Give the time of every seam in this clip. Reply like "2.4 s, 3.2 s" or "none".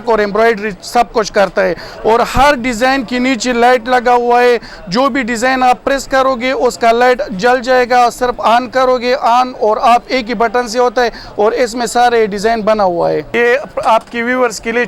13.3 s